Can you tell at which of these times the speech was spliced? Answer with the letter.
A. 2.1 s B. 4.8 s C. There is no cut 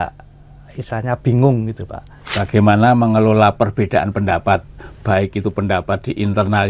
A